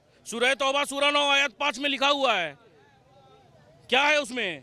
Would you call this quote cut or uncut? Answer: uncut